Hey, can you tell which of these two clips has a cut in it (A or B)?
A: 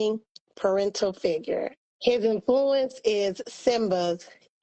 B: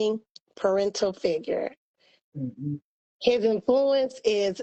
A